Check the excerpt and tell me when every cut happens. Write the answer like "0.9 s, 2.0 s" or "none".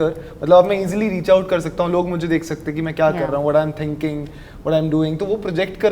none